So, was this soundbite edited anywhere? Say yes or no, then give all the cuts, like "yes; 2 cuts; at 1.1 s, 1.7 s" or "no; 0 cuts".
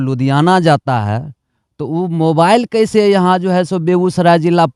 no; 0 cuts